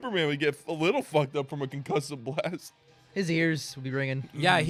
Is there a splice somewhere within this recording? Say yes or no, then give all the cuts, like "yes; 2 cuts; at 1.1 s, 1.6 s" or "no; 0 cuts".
no; 0 cuts